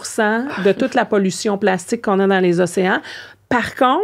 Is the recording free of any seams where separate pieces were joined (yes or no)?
yes